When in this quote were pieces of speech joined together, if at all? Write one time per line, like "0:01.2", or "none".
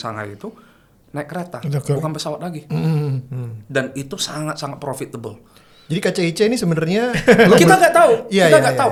none